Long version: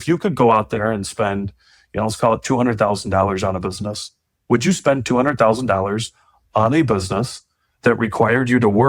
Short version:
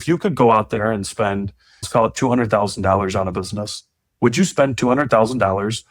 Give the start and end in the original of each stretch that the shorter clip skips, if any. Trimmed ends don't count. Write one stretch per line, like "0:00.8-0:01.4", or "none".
0:01.9-0:02.1

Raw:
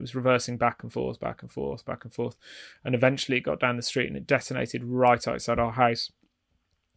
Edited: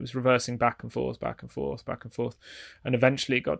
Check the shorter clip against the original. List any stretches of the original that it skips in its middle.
none

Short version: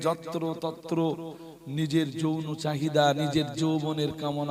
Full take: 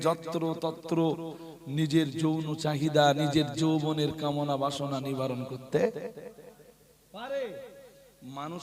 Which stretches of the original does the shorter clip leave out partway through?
none

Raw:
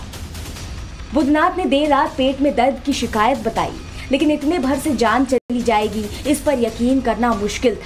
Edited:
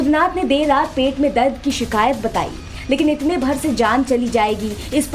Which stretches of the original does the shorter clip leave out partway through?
0:05.4-0:05.5

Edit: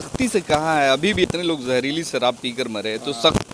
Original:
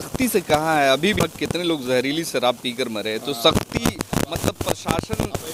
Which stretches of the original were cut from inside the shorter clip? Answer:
0:01.2-0:01.4

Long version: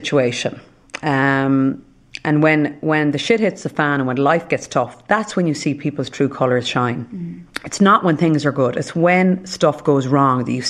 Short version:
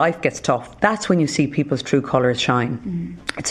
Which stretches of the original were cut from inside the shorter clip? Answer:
none

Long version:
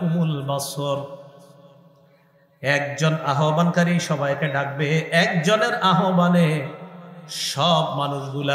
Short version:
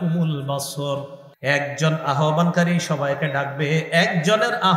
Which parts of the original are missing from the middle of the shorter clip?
0:01.2-0:02.4

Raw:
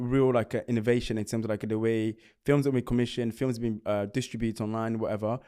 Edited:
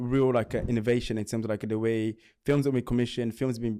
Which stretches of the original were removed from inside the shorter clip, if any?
none

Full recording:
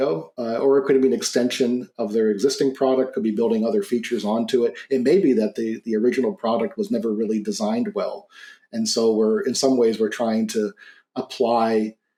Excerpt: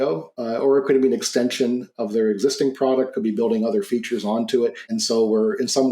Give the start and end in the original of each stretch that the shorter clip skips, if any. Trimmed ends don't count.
0:04.8-0:08.7

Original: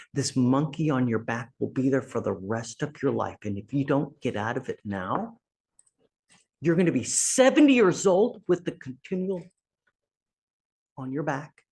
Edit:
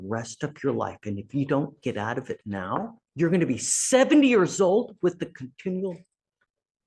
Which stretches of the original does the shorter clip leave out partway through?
0:05.4-0:06.5

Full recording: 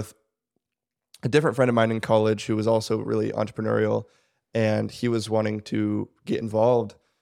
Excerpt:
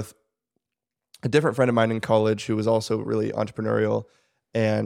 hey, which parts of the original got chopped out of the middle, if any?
none

